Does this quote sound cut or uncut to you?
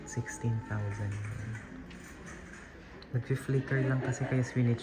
uncut